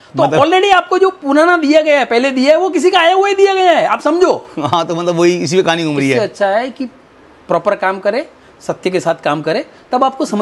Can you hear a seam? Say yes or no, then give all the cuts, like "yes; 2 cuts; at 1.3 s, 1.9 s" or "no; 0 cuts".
no; 0 cuts